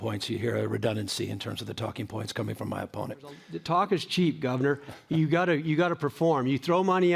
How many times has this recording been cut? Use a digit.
1